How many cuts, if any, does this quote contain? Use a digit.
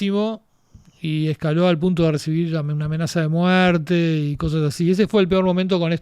0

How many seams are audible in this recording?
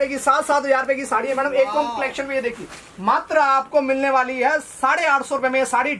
0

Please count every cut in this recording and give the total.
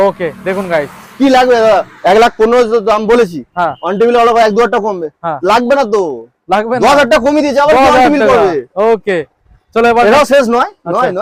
0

